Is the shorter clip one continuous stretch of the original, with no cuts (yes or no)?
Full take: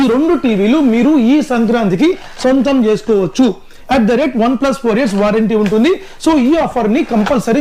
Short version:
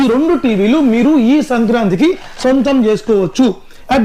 yes